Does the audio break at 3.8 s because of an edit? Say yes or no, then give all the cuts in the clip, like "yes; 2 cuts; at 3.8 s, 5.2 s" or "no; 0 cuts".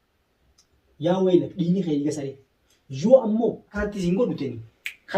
yes; 1 cut; at 3.8 s